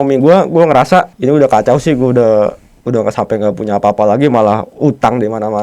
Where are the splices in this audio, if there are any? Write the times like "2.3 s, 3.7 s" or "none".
1.1 s